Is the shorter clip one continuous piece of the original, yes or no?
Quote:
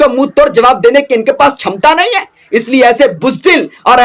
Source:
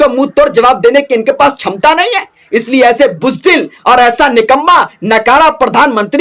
yes